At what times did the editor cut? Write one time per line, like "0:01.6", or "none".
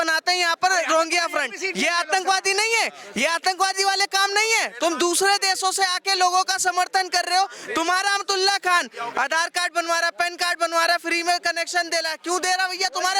none